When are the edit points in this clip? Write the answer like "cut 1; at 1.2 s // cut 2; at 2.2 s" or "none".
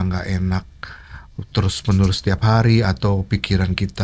none

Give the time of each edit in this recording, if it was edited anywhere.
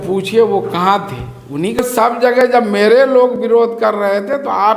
cut 1; at 1.8 s

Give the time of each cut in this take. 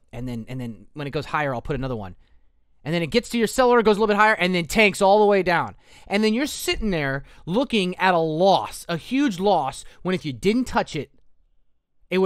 none

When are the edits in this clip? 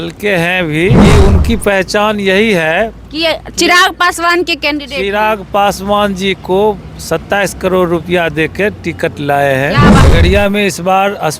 cut 1; at 1.0 s // cut 2; at 9.9 s

